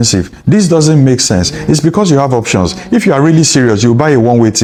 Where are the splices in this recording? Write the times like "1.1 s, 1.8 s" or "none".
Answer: none